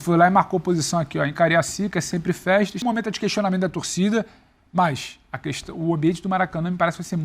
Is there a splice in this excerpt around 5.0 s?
no; 1 cut; at 2.8 s

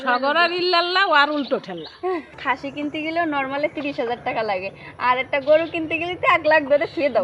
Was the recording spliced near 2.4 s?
yes; 1 cut; at 2.4 s

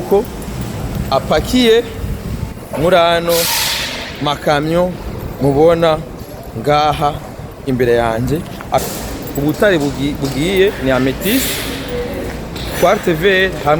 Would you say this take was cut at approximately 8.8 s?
yes; 1 cut; at 8.8 s

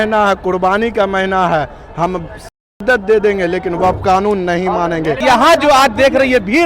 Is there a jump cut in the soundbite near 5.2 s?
yes; 1 cut; at 5.2 s

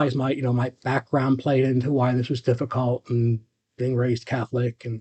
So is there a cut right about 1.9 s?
no; 0 cuts

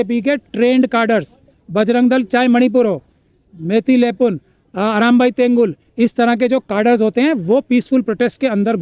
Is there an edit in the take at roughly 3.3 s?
no; 0 cuts

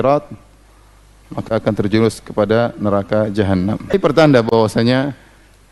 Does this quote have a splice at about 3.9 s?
yes; 1 cut; at 3.9 s

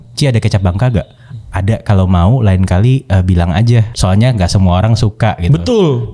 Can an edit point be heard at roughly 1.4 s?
no; 1 cut; at 3.9 s

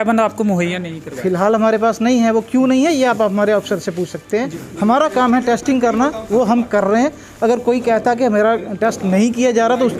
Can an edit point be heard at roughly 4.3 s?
yes; 1 cut; at 4.3 s

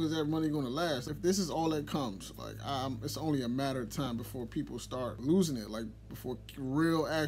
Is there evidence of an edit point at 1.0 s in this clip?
yes; 2 cuts; at 1.0 s, 5.2 s

